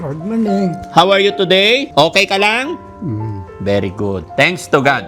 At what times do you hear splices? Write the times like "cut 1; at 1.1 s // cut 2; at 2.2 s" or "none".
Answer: cut 1; at 1.9 s